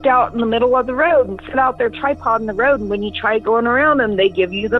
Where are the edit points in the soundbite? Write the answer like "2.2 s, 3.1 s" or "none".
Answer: none